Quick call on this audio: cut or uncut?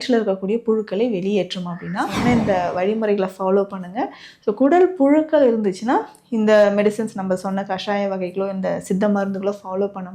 cut